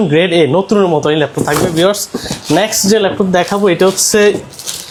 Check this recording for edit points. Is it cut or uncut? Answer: uncut